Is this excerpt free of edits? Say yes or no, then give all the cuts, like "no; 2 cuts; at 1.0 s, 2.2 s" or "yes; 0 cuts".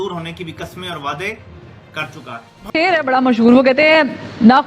no; 1 cut; at 2.5 s